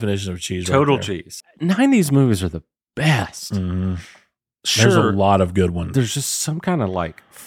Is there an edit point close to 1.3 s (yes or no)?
yes